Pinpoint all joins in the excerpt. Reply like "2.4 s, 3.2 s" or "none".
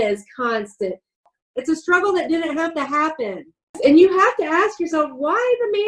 1.2 s, 3.8 s